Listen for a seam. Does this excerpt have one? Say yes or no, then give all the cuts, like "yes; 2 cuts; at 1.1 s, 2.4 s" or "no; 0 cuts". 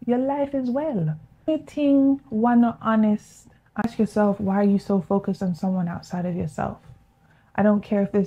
yes; 1 cut; at 3.8 s